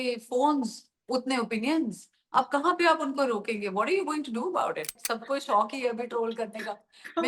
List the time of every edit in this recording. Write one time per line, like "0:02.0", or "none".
0:04.9